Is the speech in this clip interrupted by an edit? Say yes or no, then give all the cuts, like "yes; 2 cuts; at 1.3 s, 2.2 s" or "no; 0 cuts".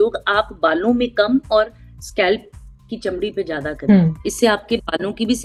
no; 0 cuts